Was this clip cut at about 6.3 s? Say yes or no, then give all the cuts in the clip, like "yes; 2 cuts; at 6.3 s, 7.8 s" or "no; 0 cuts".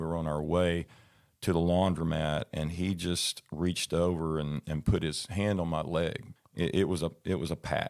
yes; 1 cut; at 6.3 s